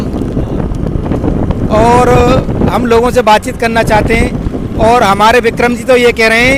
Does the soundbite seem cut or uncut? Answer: uncut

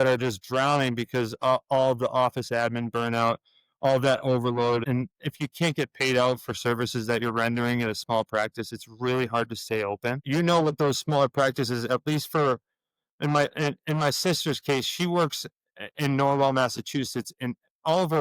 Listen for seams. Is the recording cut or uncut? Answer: cut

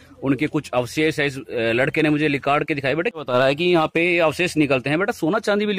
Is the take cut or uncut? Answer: cut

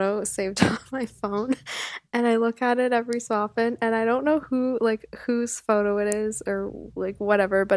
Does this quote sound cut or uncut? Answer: uncut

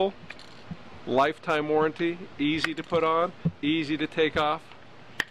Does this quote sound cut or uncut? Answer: uncut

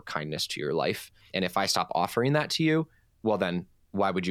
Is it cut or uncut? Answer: cut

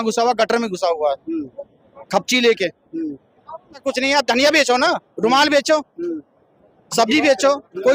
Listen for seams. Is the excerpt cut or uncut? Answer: cut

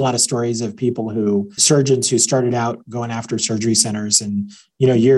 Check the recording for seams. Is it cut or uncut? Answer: cut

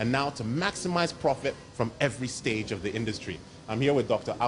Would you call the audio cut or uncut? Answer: cut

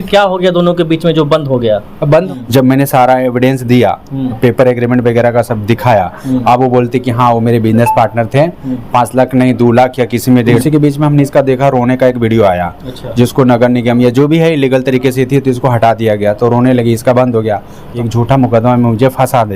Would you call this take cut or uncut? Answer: cut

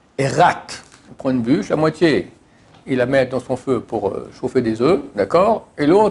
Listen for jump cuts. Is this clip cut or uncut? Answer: cut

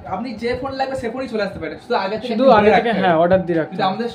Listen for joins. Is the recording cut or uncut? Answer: uncut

